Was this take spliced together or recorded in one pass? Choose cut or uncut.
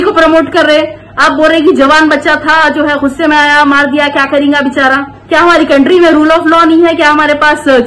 cut